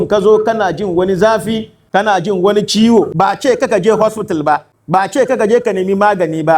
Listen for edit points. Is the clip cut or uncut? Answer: cut